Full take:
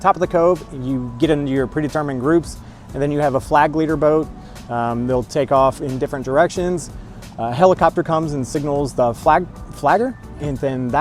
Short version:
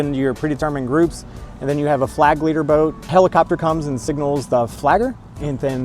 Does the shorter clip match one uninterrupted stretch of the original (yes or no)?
no